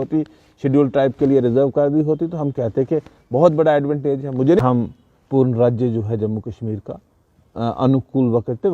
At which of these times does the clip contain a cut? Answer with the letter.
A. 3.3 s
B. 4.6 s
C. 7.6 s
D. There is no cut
B